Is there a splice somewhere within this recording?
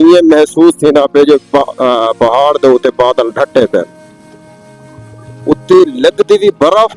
no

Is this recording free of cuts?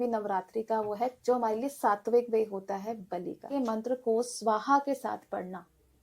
no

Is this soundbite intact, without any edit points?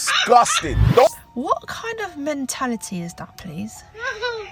no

